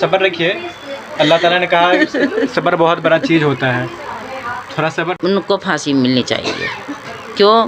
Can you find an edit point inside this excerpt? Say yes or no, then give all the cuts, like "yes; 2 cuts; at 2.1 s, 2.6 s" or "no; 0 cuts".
yes; 1 cut; at 5.1 s